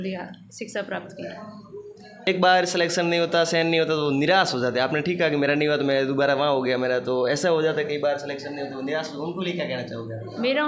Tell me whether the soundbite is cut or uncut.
cut